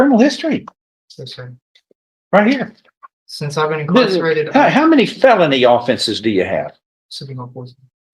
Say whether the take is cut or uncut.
uncut